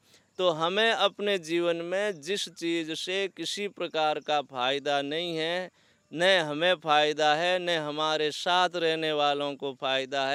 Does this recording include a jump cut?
no; 0 cuts

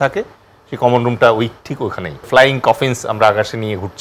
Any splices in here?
yes; 1 cut; at 2.3 s

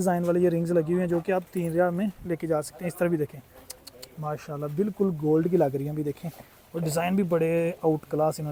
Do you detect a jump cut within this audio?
no; 0 cuts

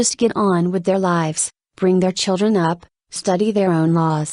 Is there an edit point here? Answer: no; 0 cuts

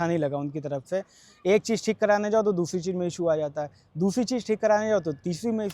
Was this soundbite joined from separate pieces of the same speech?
no; 0 cuts

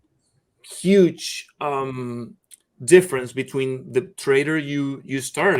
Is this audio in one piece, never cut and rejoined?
yes; 0 cuts

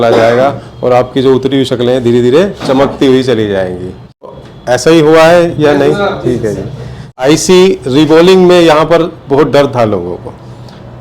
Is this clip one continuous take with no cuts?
no; 2 cuts; at 4.3 s, 7.2 s

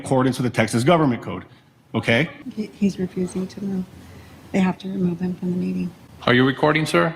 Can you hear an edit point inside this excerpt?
yes; 1 cut; at 2.4 s

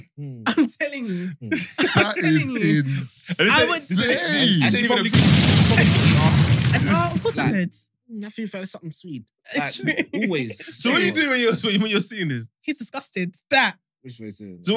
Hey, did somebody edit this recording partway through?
no; 0 cuts

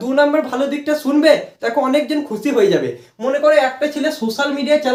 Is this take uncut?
yes; 0 cuts

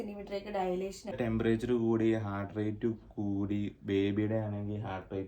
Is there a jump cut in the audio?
yes; 1 cut; at 1.2 s

